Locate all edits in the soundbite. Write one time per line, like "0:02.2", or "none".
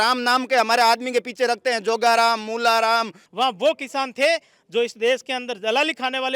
0:03.2

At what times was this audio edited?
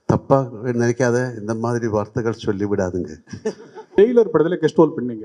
0:04.0

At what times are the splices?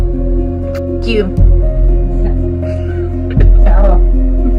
none

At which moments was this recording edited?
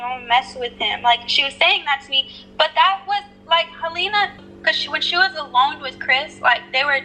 0:04.4

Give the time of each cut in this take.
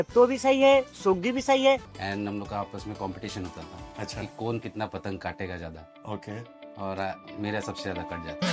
0:01.9

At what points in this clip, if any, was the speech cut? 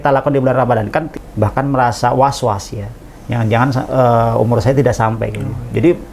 0:01.2

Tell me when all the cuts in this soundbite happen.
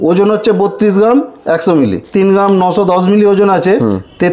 0:02.0

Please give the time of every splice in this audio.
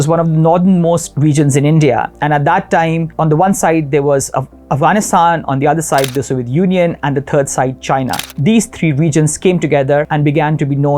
0:03.1
0:08.2
0:10.1

